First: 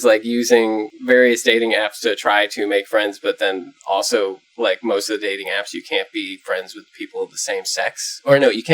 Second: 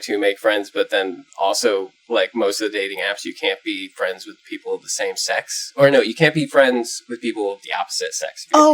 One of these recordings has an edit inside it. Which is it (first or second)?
first